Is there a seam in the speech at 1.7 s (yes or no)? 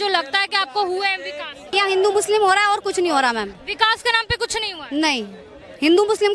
yes